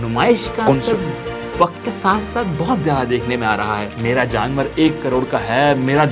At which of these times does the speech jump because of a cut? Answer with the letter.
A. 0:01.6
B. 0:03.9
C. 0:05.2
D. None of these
B